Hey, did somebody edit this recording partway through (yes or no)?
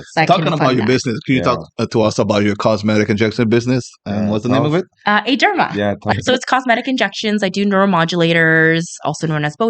yes